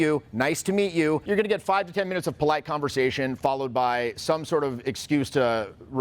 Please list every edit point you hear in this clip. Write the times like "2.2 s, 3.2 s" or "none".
1.2 s